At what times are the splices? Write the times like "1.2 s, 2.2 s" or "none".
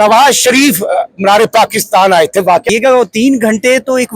2.7 s